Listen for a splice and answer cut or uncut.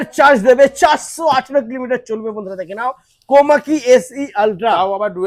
uncut